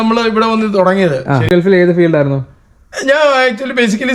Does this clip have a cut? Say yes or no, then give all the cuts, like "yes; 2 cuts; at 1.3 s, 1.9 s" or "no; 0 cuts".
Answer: yes; 1 cut; at 1.5 s